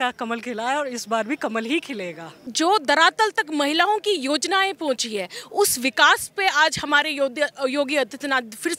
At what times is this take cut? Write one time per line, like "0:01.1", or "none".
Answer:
0:02.5